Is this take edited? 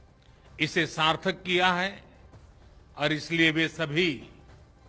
no; 0 cuts

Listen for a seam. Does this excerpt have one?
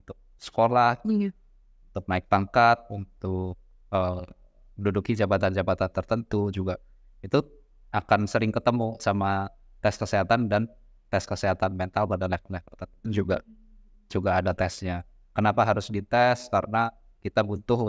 no; 0 cuts

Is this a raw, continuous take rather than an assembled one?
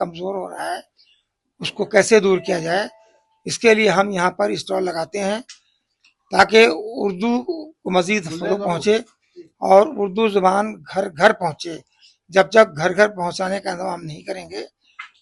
yes; 0 cuts

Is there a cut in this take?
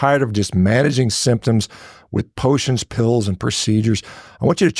no; 0 cuts

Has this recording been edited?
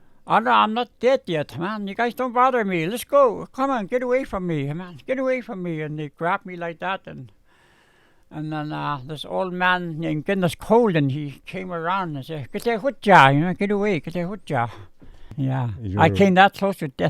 yes; 1 cut; at 15.3 s

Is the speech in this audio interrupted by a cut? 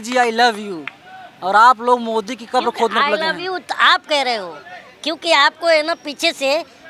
no; 0 cuts

